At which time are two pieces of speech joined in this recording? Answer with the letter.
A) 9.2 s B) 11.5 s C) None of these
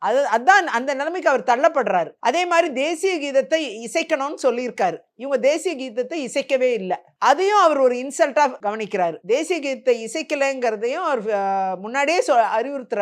C